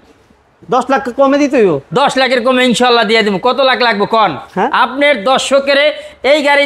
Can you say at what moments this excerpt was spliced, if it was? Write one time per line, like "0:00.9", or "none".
none